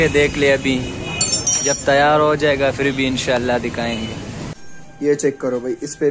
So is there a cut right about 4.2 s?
yes; 1 cut; at 4.2 s

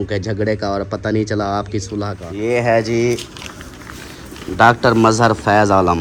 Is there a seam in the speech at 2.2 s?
yes; 1 cut; at 2.2 s

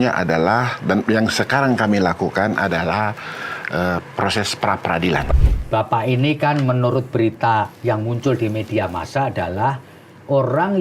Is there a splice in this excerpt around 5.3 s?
yes; 1 cut; at 5.3 s

